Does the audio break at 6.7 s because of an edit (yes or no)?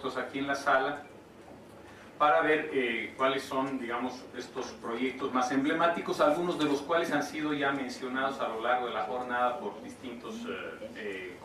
yes